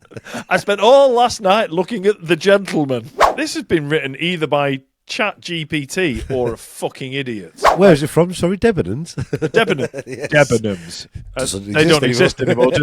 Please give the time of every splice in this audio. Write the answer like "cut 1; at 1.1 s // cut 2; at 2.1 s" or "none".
cut 1; at 3.2 s // cut 2; at 7.6 s